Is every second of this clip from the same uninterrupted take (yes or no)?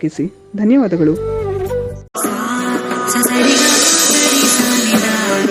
no